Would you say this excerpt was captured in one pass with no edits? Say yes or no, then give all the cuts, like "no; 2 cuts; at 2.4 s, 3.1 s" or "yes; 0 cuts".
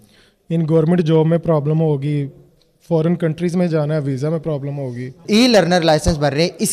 no; 1 cut; at 5.2 s